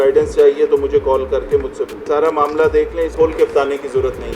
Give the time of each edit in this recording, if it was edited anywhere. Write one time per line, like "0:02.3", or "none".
0:02.0
0:03.1